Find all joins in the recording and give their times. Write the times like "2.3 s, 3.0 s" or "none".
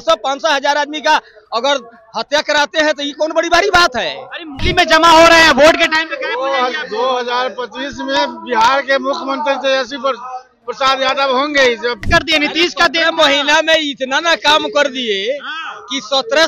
4.5 s, 12.1 s